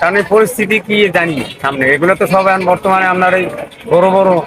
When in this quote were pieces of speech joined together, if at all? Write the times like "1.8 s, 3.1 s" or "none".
none